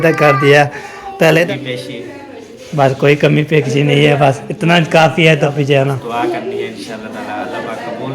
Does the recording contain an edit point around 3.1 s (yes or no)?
no